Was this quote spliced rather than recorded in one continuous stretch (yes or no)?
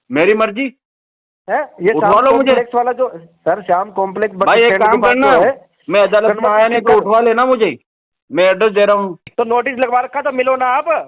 yes